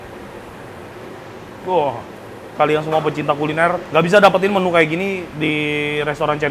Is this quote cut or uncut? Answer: cut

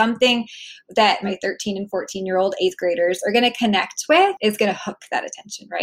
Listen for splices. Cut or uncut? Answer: cut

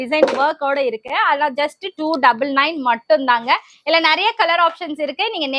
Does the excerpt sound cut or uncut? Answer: uncut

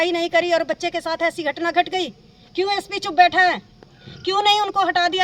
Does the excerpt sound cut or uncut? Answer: uncut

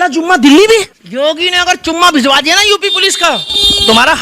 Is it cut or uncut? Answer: cut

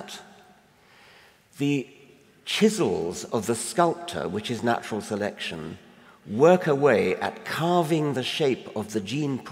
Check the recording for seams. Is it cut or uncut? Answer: cut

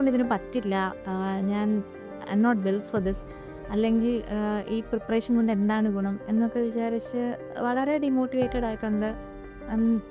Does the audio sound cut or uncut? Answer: uncut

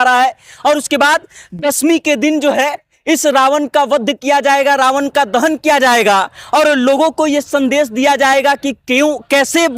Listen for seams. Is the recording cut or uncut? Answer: uncut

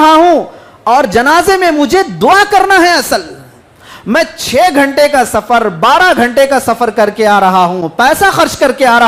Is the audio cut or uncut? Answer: uncut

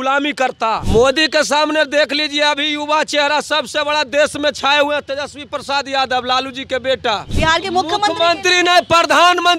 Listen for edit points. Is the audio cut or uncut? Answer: cut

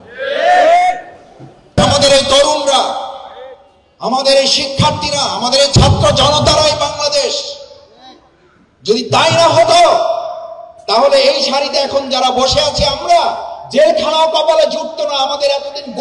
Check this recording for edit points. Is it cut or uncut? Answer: cut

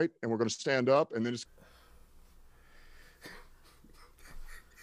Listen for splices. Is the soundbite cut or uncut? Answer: cut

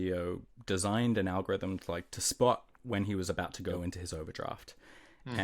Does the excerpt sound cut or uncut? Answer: cut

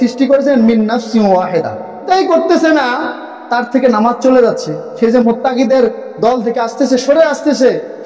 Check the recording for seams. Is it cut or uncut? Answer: cut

